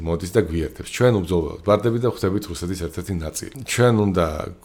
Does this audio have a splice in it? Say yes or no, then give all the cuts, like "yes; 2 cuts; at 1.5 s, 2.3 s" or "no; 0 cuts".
yes; 1 cut; at 3.6 s